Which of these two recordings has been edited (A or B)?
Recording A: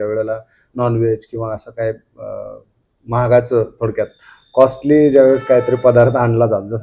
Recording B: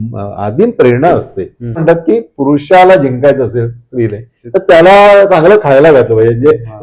B